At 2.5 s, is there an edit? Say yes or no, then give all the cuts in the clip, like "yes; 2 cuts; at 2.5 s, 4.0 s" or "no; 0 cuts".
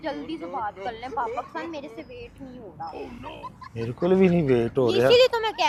no; 0 cuts